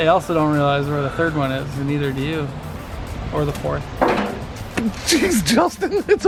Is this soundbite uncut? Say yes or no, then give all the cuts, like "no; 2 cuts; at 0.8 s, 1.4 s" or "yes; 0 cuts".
yes; 0 cuts